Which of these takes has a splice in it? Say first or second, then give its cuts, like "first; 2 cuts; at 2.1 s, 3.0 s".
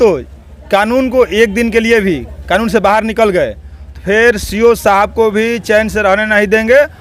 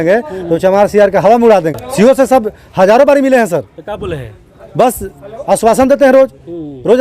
second; 1 cut; at 1.8 s